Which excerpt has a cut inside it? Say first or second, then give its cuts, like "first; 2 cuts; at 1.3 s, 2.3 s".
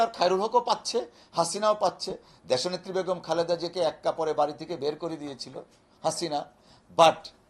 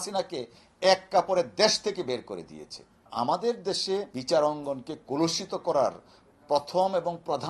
second; 2 cuts; at 3.1 s, 4.1 s